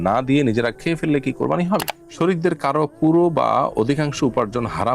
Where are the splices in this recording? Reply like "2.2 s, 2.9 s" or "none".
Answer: 1.9 s